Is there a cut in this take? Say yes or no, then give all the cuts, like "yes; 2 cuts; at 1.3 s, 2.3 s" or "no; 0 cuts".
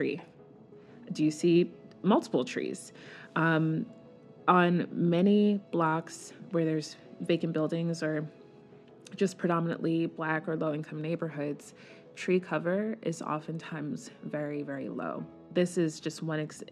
yes; 1 cut; at 15.4 s